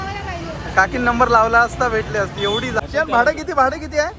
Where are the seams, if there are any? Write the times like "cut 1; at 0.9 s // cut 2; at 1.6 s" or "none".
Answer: cut 1; at 2.8 s